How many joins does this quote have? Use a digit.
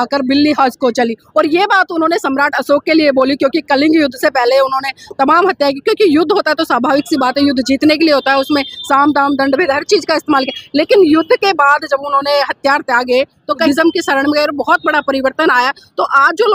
1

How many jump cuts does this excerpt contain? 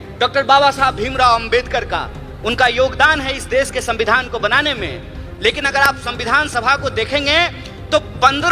0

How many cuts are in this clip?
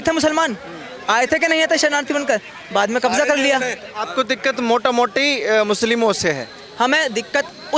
0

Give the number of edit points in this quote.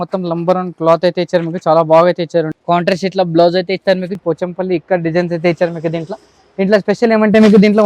2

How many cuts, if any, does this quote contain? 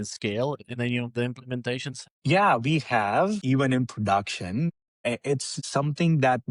3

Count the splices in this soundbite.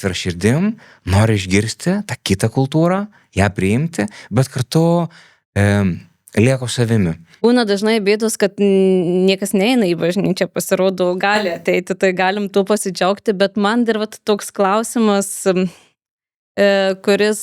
1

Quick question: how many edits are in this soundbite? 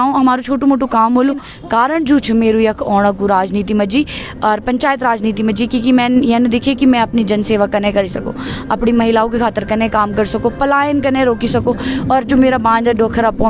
1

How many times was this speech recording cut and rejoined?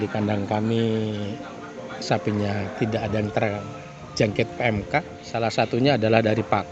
1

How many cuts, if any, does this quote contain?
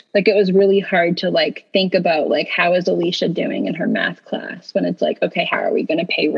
1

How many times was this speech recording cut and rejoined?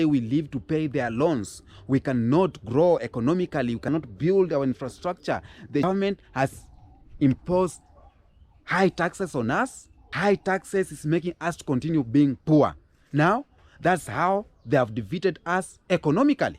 2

